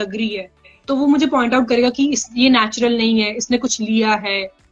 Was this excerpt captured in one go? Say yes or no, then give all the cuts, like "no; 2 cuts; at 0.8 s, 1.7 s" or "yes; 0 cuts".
yes; 0 cuts